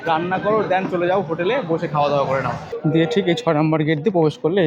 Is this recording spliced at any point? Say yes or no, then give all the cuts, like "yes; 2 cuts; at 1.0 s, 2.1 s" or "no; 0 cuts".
yes; 1 cut; at 2.6 s